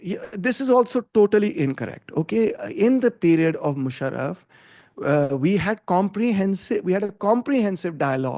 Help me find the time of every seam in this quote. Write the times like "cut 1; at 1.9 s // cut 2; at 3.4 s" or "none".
none